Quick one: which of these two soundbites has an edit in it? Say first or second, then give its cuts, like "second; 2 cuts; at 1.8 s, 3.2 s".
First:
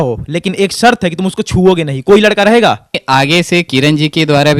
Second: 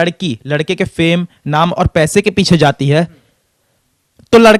first; 1 cut; at 3.0 s